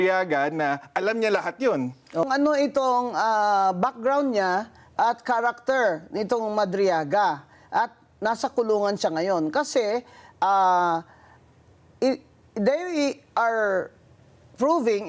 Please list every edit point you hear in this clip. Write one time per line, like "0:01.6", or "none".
0:02.2